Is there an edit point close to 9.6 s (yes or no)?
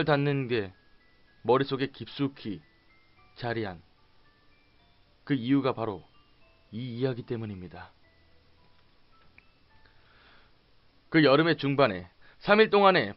no